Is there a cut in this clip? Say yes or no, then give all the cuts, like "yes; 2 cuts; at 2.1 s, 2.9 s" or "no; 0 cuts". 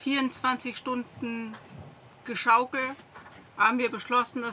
no; 0 cuts